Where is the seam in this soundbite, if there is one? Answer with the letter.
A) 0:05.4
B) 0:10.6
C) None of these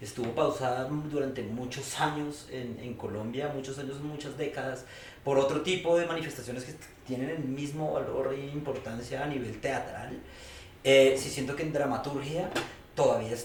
C